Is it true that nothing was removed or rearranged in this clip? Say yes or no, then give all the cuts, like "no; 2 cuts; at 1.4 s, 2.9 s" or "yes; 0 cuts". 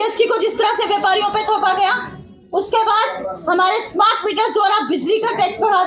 yes; 0 cuts